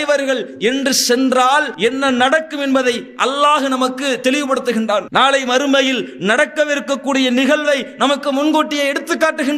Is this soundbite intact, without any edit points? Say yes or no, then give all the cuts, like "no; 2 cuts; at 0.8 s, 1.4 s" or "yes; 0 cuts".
no; 1 cut; at 1.7 s